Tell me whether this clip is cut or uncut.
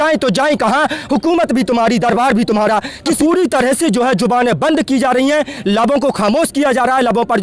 cut